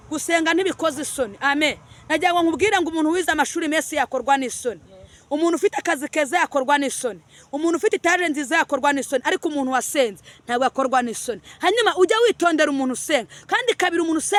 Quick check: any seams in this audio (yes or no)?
no